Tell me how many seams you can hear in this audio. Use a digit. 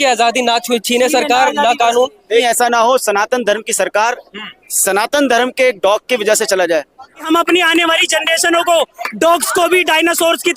2